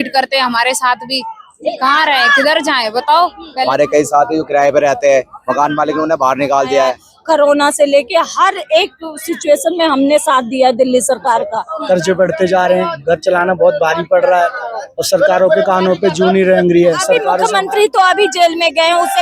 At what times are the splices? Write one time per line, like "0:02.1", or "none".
0:03.5
0:07.1
0:11.7
0:17.3